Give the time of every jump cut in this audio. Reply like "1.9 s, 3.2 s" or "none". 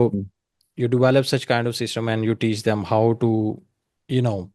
none